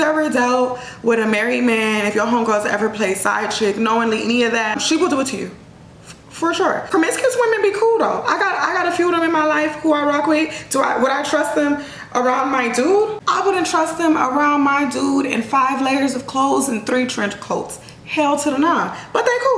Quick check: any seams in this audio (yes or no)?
yes